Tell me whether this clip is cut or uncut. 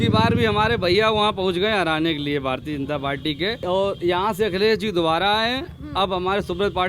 cut